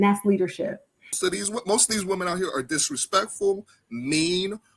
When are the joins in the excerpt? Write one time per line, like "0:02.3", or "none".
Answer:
0:01.1